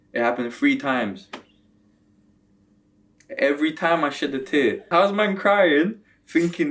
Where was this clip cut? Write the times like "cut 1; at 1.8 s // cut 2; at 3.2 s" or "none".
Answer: cut 1; at 4.9 s